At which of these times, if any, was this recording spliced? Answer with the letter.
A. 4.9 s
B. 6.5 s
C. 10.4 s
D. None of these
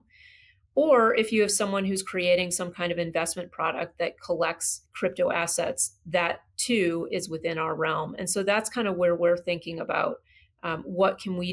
A